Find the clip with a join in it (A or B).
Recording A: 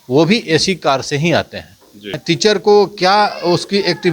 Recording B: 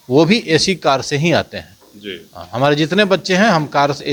A